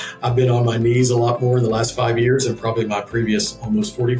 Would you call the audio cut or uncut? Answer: uncut